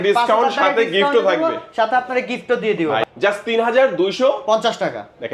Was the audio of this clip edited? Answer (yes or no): yes